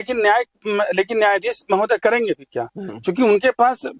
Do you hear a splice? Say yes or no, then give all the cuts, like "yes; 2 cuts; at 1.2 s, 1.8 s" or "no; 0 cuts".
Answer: no; 0 cuts